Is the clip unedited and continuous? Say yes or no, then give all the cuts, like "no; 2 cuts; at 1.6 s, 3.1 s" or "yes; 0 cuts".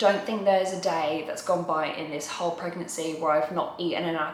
yes; 0 cuts